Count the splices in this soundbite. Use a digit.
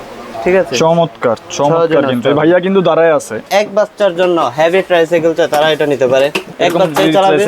1